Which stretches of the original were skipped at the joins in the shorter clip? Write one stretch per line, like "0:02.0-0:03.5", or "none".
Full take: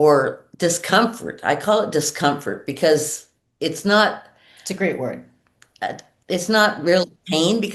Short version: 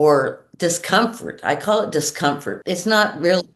0:02.5-0:06.2